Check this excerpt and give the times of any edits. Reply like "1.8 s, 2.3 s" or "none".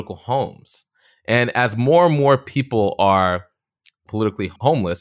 none